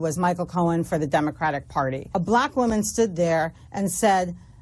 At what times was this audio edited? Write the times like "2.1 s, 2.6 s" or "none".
2.0 s